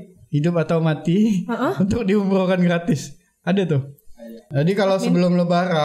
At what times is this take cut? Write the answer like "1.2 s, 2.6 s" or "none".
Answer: 4.5 s